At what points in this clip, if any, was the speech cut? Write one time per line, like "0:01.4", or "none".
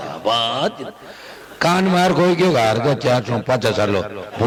none